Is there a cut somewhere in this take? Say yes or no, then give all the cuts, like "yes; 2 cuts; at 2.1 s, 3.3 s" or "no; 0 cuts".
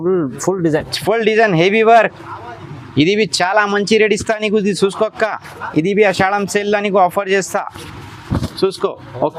no; 0 cuts